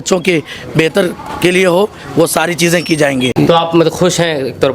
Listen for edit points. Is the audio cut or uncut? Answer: cut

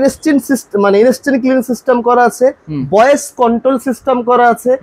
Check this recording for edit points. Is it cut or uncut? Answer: uncut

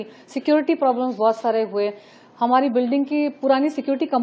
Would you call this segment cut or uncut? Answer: uncut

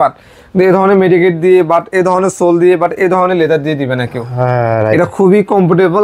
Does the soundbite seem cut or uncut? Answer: uncut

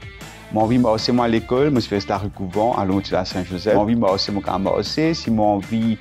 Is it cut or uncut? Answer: cut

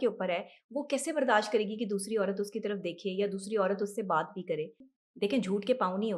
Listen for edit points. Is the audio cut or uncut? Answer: cut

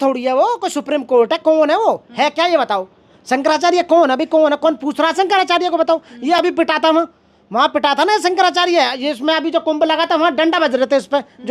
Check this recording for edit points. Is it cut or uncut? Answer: uncut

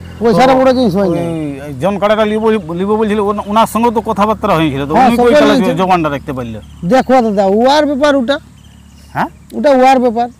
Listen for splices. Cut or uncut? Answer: uncut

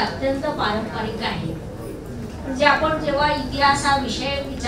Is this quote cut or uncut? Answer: uncut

